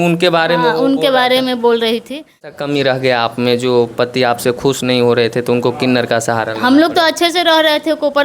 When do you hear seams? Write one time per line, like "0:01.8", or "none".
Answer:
0:02.5